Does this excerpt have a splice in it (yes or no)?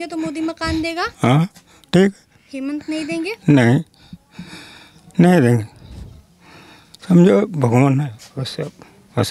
no